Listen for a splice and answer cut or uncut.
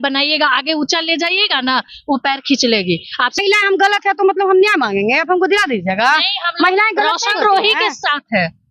cut